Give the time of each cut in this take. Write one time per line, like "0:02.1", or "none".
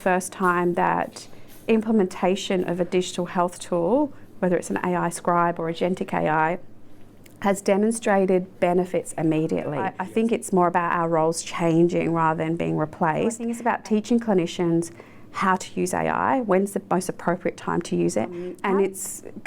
0:10.0
0:13.6
0:18.5